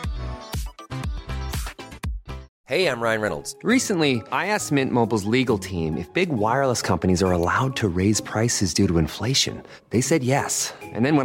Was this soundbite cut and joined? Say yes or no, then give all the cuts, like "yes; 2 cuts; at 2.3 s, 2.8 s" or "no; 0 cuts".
yes; 1 cut; at 2.5 s